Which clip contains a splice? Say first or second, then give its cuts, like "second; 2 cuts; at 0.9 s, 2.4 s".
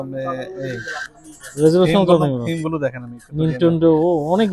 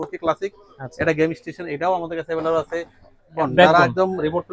second; 1 cut; at 3.3 s